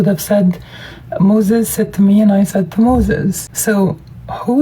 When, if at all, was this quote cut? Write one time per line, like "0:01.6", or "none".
0:03.5

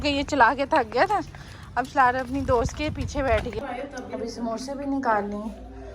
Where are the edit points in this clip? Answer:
0:03.5

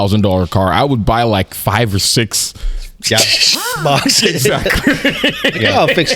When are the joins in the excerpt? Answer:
none

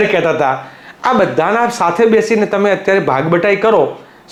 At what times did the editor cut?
none

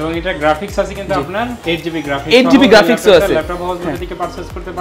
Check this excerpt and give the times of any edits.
none

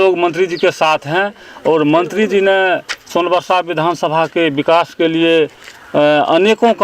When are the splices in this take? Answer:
none

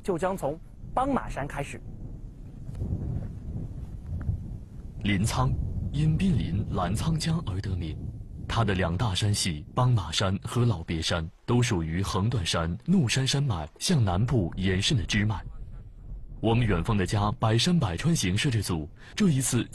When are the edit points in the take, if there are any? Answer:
0:01.8

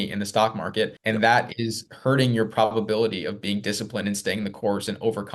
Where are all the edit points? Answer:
0:01.0

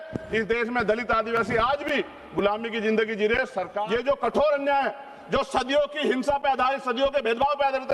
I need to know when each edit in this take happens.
0:03.8

